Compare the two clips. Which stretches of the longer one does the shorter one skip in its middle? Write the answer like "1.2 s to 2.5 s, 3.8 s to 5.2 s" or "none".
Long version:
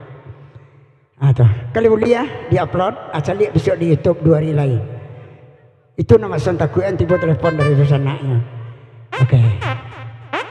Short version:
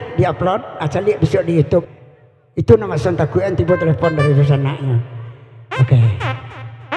4.2 s to 5.3 s